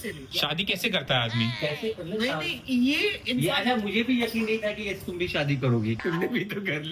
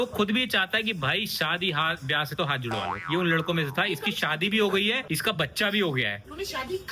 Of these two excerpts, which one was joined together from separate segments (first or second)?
first